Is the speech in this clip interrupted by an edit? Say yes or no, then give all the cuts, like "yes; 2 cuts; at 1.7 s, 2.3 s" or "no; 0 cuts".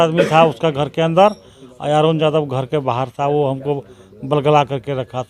no; 0 cuts